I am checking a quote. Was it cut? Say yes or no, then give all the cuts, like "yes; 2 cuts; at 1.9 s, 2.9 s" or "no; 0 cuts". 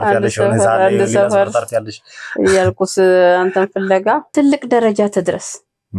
yes; 1 cut; at 4.3 s